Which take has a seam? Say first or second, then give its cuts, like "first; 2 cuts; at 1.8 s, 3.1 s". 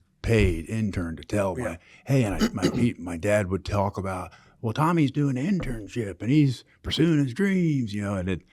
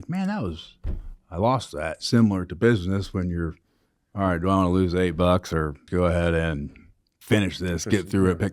second; 1 cut; at 5.9 s